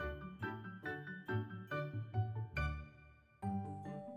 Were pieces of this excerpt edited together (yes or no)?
no